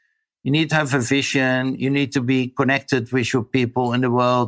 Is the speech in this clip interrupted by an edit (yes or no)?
no